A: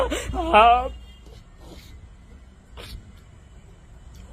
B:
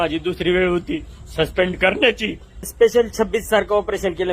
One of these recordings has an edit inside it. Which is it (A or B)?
B